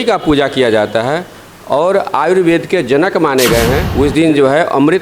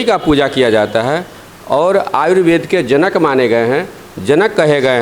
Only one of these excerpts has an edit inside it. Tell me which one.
first; 1 cut; at 3.9 s

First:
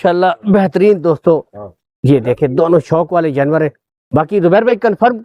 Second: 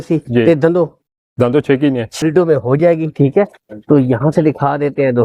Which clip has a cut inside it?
second; 1 cut; at 2.1 s

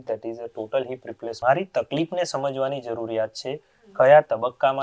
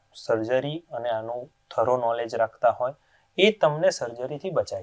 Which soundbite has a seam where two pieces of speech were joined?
first; 1 cut; at 1.4 s

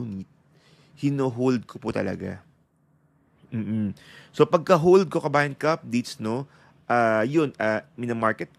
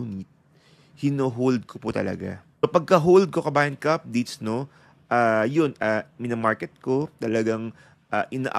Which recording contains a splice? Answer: second; 1 cut; at 2.6 s

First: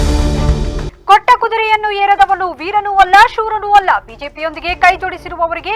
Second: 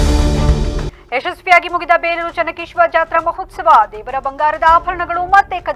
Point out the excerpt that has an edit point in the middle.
second; 1 cut; at 0.9 s

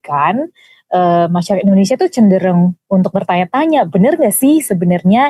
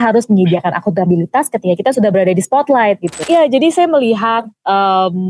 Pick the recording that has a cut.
second; 1 cut; at 3.2 s

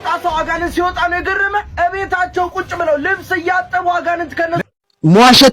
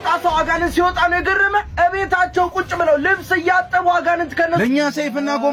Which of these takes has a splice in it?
first; 1 cut; at 4.6 s

